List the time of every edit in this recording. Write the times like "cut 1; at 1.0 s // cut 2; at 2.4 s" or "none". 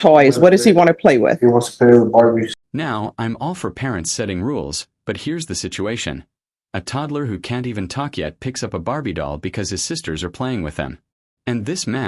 none